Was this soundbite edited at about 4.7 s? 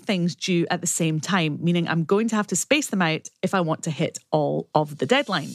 yes; 1 cut; at 4.7 s

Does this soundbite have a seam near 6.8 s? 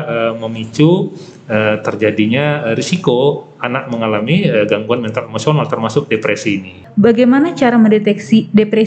yes; 1 cut; at 6.8 s

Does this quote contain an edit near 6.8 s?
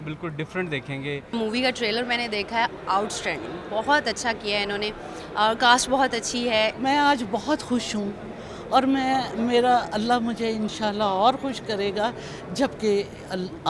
yes; 2 cuts; at 1.3 s, 6.8 s

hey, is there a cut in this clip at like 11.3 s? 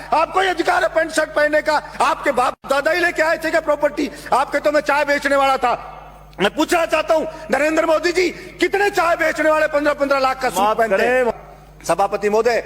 yes; 1 cut; at 11.3 s

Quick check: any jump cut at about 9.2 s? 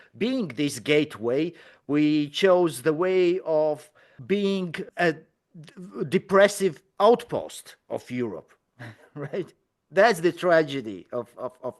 no; 1 cut; at 4.3 s

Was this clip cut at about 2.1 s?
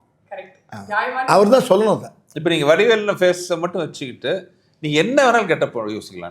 no; 0 cuts

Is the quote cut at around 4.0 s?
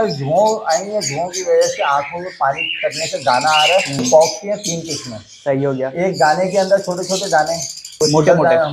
yes; 2 cuts; at 4.0 s, 7.8 s

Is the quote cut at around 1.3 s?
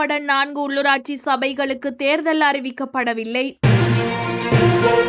no; 0 cuts

